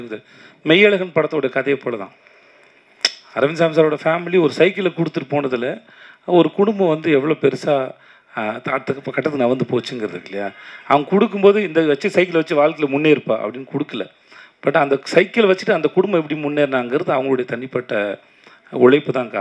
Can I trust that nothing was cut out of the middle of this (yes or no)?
yes